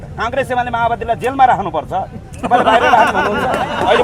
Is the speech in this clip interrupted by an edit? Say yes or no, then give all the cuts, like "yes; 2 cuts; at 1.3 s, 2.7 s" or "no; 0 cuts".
no; 0 cuts